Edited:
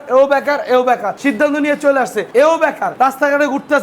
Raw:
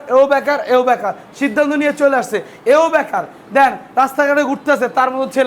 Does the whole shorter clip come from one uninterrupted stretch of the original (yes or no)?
no